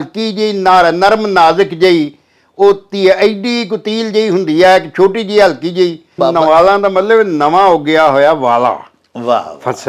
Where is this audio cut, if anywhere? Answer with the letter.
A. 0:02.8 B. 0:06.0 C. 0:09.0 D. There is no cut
B